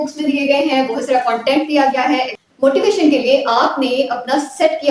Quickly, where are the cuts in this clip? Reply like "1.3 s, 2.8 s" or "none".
2.3 s